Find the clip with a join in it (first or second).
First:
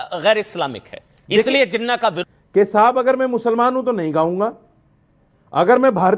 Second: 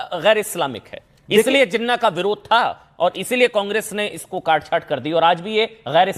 first